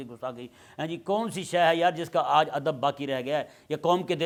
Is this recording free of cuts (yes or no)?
yes